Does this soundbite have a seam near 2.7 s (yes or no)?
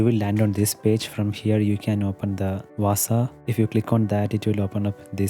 yes